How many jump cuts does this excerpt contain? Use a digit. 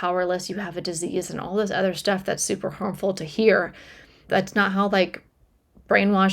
1